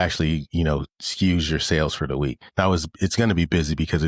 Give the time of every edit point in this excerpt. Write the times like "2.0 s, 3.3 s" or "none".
2.4 s